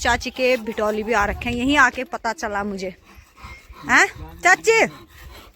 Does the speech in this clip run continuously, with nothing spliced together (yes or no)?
yes